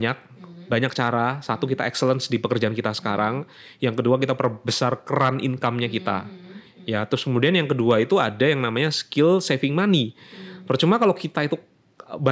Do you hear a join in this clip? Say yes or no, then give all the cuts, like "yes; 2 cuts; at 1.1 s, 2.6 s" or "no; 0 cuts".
no; 0 cuts